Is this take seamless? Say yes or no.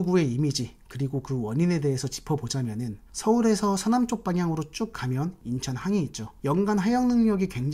no